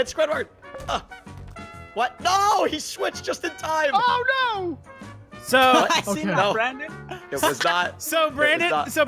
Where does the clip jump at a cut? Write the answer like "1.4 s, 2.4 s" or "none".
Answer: 4.9 s